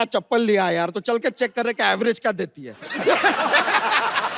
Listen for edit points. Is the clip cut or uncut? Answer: uncut